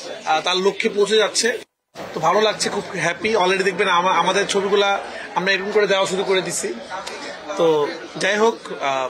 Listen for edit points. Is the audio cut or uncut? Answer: uncut